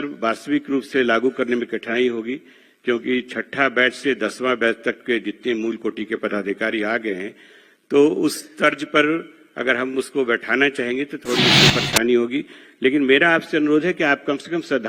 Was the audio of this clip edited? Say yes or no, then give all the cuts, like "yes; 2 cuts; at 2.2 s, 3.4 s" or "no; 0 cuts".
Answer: no; 0 cuts